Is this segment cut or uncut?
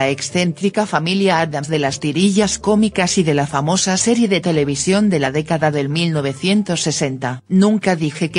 uncut